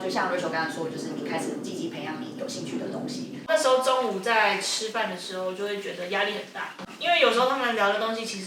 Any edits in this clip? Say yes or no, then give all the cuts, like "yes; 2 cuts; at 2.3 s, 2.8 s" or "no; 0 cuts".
yes; 1 cut; at 3.4 s